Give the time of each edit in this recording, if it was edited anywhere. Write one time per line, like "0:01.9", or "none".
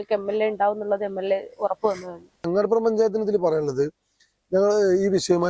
0:02.4